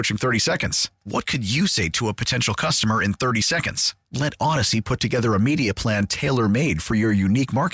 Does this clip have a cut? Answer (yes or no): no